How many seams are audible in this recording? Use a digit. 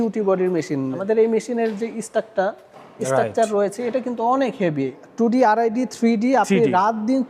2